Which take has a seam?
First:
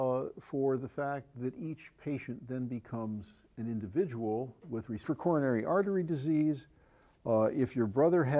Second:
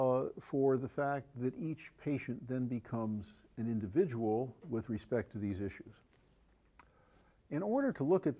second; 1 cut; at 5.1 s

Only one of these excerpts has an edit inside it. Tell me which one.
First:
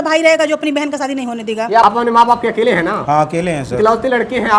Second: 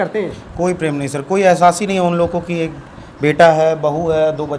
first; 1 cut; at 1.8 s

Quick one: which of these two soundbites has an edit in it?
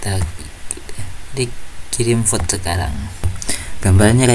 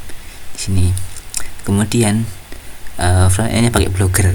first; 1 cut; at 3.4 s

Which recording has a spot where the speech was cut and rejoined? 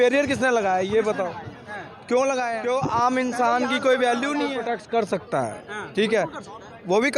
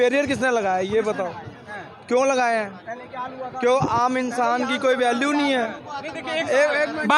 first; 2 cuts; at 2.6 s, 4.5 s

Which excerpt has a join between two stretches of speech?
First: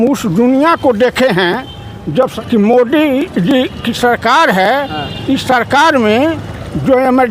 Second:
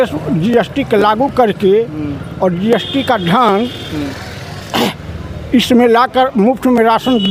first; 1 cut; at 2.3 s

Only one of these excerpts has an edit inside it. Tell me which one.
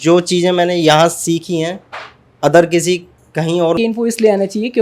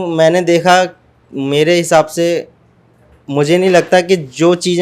first; 1 cut; at 3.8 s

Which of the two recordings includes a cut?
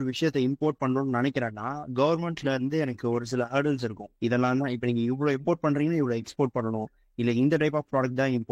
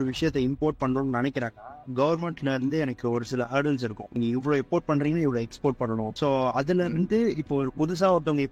second; 2 cuts; at 4.2 s, 6.1 s

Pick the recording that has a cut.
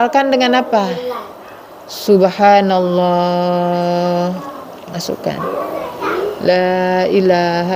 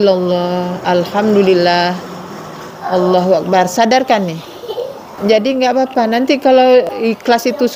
second; 2 cuts; at 5.0 s, 6.9 s

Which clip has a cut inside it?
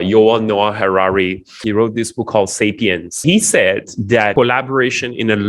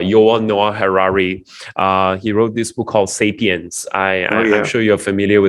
first; 3 cuts; at 1.6 s, 3.2 s, 4.3 s

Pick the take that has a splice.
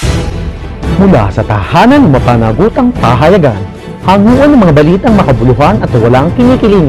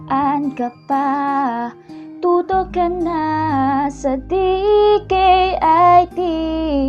first; 1 cut; at 1.0 s

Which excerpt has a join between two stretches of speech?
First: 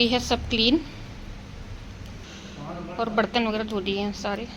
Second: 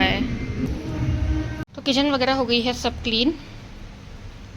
second; 1 cut; at 1.6 s

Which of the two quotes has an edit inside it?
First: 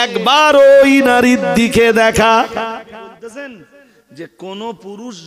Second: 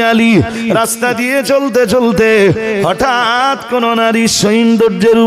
first; 1 cut; at 3.1 s

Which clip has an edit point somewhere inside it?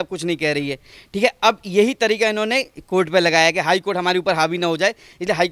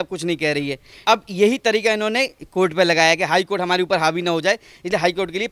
second; 1 cut; at 1.0 s

